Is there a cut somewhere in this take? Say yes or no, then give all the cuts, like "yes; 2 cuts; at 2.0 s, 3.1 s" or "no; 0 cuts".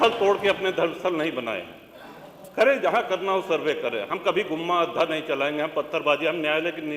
no; 0 cuts